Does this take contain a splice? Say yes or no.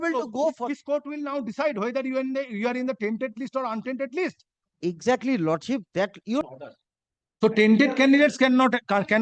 yes